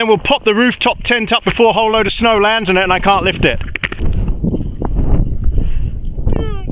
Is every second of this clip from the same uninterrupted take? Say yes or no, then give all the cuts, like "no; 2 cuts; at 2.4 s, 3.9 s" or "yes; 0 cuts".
no; 1 cut; at 3.9 s